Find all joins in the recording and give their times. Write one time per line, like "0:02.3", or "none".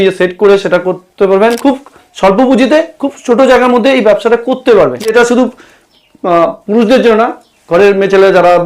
0:01.6
0:05.1